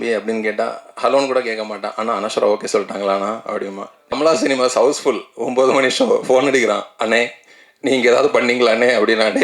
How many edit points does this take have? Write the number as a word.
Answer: one